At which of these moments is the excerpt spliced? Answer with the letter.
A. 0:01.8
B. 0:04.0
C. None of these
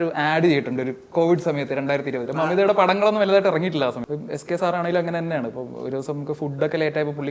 B